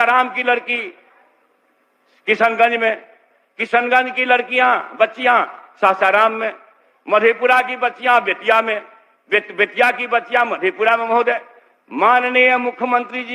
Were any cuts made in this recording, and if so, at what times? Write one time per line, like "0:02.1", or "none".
none